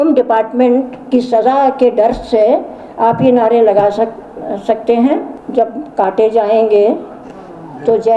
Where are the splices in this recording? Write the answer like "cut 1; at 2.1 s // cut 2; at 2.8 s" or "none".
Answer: cut 1; at 5.4 s